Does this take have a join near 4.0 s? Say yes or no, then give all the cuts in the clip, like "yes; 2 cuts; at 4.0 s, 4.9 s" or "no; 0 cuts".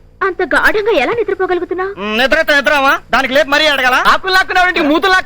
yes; 1 cut; at 4.0 s